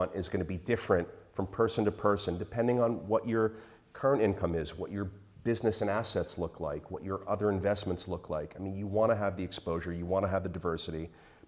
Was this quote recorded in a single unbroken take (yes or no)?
yes